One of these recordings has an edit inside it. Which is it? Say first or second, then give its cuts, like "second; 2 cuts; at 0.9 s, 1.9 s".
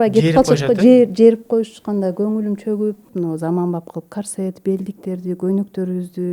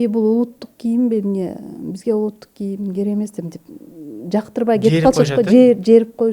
first; 1 cut; at 3.0 s